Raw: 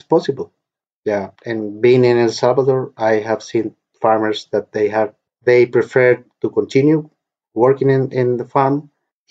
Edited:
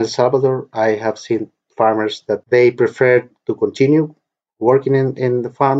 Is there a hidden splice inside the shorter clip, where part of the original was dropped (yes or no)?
yes